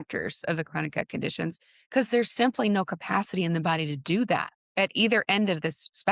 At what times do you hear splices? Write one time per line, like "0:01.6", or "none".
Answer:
0:04.6